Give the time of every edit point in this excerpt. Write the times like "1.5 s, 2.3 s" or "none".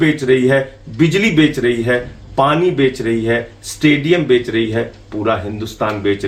none